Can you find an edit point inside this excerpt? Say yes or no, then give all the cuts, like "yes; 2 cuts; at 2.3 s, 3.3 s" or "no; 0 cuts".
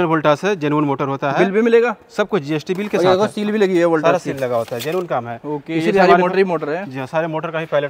no; 0 cuts